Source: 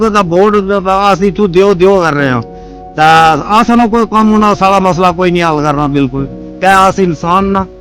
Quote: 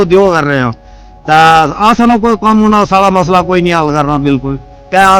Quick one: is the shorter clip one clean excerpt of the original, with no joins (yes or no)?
yes